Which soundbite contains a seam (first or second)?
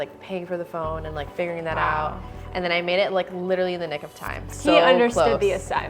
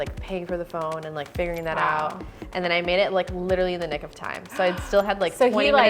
first